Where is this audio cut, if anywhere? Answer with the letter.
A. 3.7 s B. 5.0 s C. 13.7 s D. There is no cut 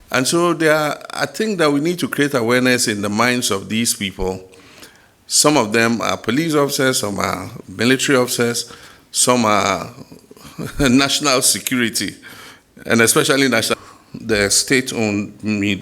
C